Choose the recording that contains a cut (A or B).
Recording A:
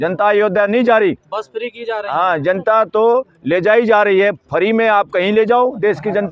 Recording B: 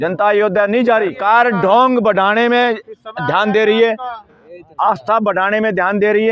B